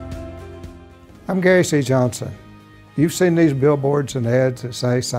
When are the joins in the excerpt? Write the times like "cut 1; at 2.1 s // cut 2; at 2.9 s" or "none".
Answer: cut 1; at 1.1 s